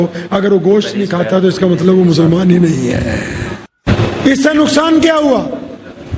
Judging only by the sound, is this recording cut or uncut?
cut